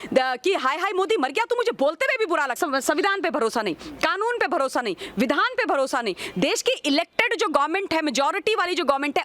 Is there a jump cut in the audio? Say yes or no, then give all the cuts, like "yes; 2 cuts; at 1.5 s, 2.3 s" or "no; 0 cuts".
yes; 1 cut; at 2.6 s